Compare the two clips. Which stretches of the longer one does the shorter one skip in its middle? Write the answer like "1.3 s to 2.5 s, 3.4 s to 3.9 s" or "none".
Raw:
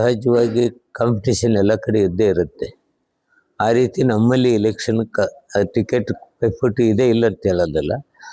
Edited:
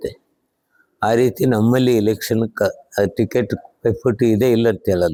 none